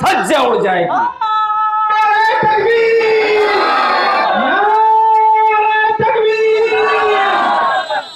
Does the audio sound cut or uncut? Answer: uncut